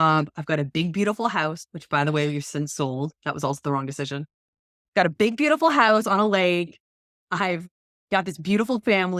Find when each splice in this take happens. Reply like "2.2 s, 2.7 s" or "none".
none